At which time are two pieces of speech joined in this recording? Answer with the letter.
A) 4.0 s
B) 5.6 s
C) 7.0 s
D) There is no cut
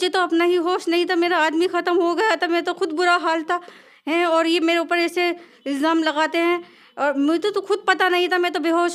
D